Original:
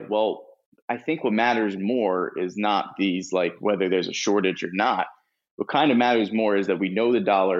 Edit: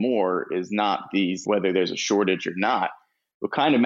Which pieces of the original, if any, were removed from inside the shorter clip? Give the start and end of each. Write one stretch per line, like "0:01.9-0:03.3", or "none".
0:03.3-0:03.6